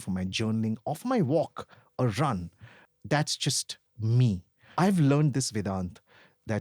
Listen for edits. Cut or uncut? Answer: cut